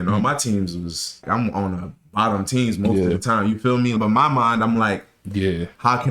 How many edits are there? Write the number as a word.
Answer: two